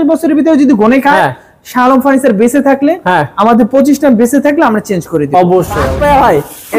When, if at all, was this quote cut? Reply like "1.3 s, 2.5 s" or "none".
5.7 s